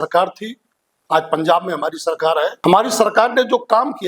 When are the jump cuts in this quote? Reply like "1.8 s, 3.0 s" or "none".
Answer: 2.6 s